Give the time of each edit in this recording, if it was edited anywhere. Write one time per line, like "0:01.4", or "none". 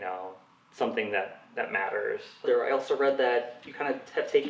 0:02.3